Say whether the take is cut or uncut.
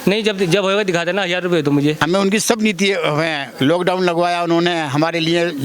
cut